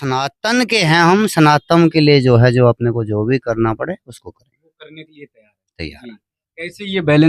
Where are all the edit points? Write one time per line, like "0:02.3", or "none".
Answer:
none